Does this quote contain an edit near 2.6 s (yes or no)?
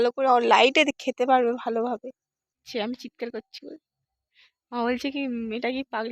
yes